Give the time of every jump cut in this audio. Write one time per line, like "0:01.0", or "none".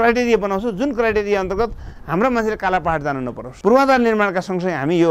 0:03.5